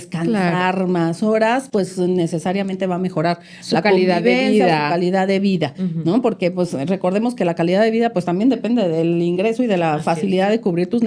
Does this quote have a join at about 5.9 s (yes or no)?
no